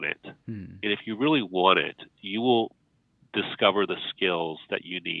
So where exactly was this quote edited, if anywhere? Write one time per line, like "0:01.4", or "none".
none